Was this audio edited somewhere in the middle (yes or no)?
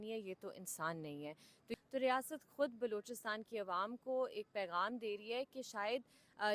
yes